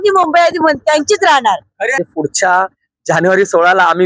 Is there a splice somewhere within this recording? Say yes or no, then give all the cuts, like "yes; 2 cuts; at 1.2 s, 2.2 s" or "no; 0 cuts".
yes; 1 cut; at 2.0 s